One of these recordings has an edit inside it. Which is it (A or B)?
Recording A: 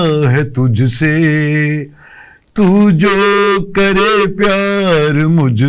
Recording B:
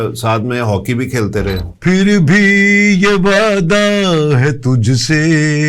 B